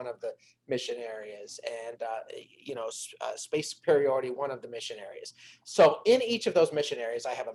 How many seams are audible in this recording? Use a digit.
0